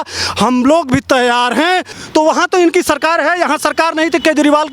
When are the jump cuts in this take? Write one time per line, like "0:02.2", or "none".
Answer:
0:01.9